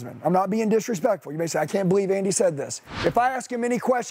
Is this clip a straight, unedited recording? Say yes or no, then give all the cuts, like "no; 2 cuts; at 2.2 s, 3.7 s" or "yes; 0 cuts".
no; 1 cut; at 2.8 s